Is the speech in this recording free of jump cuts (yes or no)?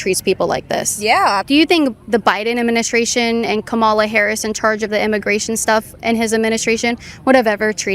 no